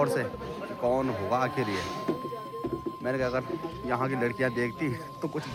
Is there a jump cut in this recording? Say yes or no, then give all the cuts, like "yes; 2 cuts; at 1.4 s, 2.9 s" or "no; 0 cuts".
no; 0 cuts